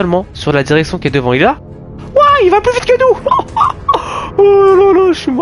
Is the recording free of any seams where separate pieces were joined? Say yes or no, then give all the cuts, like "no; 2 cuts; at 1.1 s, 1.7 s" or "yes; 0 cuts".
yes; 0 cuts